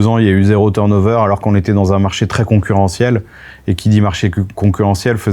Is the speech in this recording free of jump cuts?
yes; 0 cuts

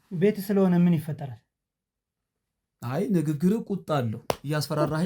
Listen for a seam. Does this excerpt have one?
no; 0 cuts

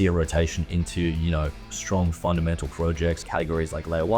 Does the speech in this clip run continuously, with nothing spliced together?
no; 1 cut; at 3.2 s

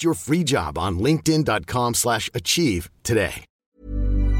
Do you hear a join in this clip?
yes; 1 cut; at 3.5 s

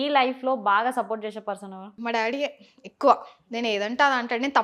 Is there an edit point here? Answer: yes; 1 cut; at 1.9 s

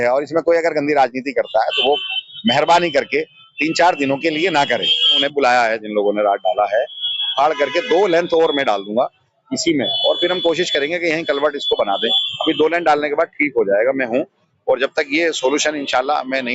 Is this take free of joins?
no; 1 cut; at 5.2 s

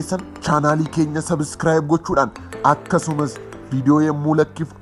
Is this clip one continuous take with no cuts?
yes; 0 cuts

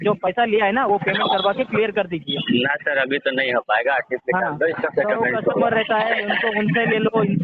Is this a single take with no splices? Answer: yes; 0 cuts

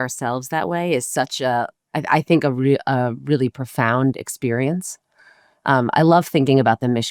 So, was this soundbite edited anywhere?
no; 0 cuts

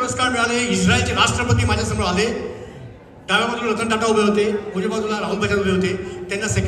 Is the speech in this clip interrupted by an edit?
no; 0 cuts

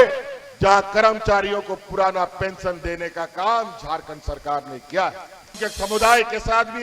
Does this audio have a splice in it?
yes; 1 cut; at 5.5 s

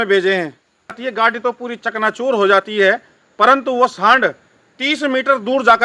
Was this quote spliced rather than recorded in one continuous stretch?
yes; 1 cut; at 1.0 s

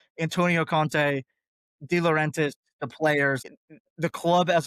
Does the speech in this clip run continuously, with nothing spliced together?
yes; 0 cuts

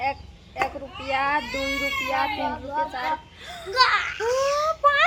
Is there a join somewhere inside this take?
no; 0 cuts

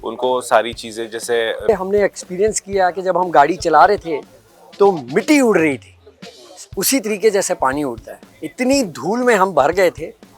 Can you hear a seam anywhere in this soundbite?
yes; 1 cut; at 1.7 s

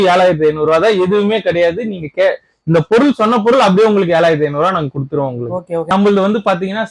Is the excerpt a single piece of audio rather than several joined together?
yes; 0 cuts

